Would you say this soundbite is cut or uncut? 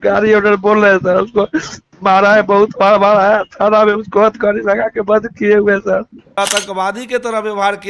cut